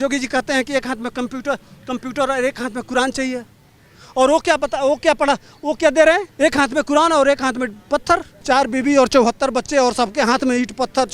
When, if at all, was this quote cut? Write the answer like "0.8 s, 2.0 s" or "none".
6.3 s, 8.4 s